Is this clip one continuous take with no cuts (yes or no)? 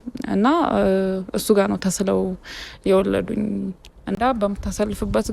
no